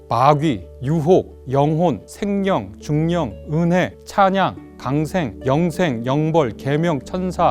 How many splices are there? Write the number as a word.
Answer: four